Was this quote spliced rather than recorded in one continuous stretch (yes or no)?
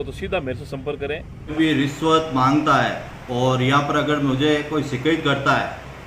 yes